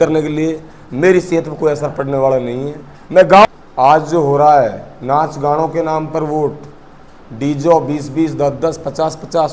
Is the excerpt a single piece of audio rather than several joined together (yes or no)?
no